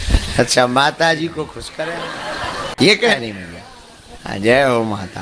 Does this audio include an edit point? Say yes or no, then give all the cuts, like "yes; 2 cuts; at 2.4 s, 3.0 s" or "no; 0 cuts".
yes; 1 cut; at 1.6 s